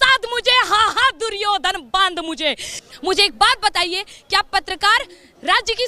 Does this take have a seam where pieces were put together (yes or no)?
yes